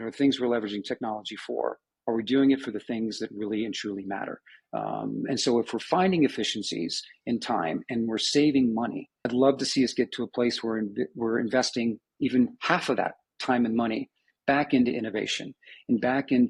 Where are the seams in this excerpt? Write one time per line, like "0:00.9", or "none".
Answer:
none